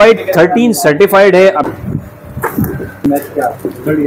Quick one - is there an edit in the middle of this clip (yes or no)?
yes